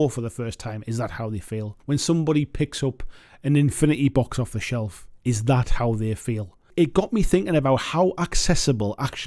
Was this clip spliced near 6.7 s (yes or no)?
yes